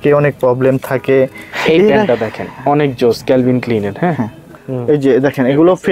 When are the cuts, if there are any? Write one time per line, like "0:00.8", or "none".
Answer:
0:01.5
0:04.5

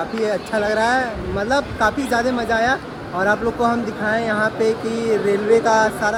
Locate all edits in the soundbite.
none

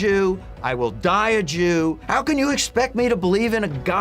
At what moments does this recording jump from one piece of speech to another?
0:02.0

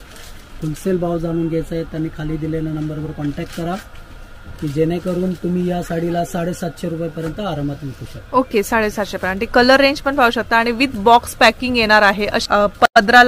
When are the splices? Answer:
none

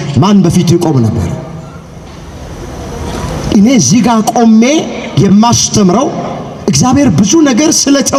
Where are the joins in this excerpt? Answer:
none

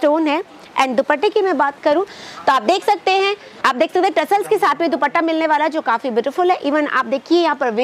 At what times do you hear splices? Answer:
0:03.5

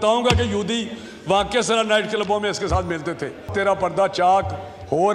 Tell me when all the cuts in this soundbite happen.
0:03.5

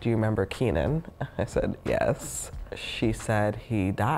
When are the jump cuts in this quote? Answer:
0:02.2

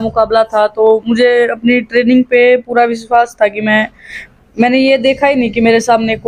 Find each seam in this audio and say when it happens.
none

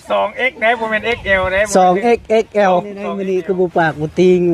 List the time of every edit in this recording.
0:03.1

